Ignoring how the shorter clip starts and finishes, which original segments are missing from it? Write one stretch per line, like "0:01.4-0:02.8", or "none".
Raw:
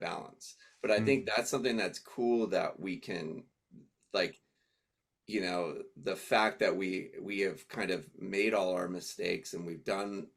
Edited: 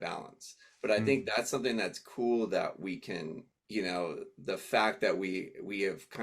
0:03.5-0:05.1